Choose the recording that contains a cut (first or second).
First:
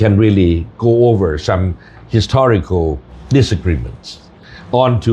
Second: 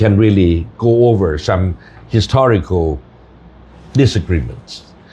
first